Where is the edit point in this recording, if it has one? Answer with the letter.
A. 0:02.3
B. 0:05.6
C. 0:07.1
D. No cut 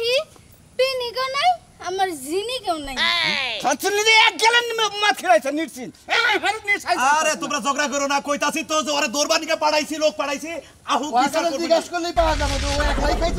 D